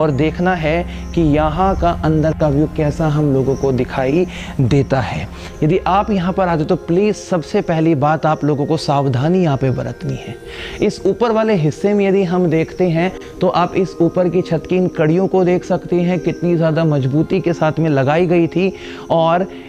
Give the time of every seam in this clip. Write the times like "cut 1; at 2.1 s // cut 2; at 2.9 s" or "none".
none